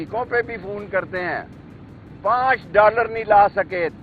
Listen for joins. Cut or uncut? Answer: uncut